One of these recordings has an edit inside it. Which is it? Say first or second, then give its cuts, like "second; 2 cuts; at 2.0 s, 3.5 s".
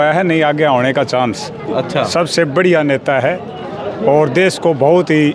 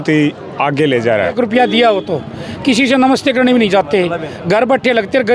second; 1 cut; at 1.3 s